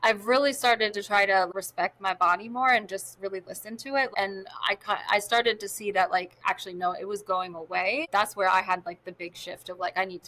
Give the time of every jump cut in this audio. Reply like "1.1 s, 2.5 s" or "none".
1.5 s, 4.1 s, 8.1 s

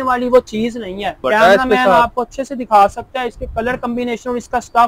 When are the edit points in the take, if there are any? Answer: 1.2 s

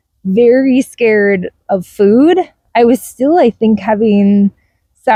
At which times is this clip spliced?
none

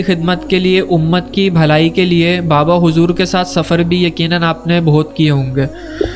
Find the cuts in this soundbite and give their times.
none

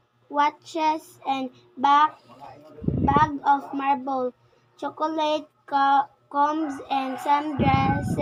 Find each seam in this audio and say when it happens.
none

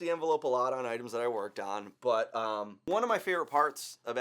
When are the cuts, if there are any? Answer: 2.8 s

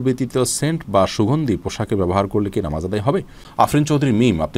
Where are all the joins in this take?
3.4 s

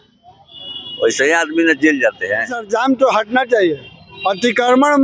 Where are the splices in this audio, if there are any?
2.6 s

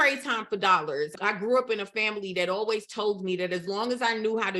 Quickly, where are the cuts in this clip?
1.1 s

